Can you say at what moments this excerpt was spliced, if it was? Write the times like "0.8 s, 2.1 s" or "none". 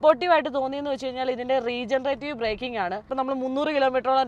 3.1 s